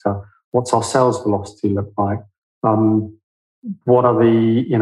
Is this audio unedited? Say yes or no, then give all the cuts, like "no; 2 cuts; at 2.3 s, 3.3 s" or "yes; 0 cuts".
yes; 0 cuts